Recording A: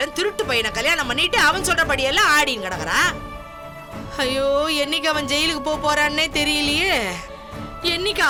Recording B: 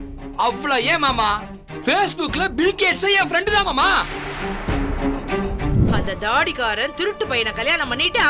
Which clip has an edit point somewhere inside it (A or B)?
B